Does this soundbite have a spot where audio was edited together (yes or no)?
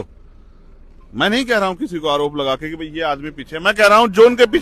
no